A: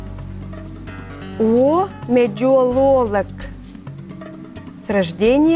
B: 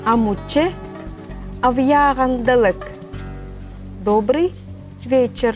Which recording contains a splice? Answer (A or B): A